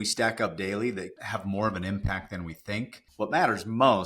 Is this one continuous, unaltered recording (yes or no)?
no